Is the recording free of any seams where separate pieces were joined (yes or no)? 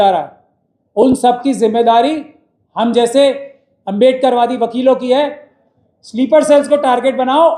no